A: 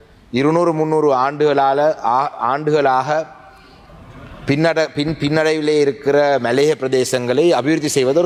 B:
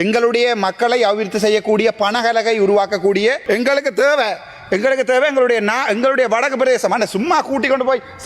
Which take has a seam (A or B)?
B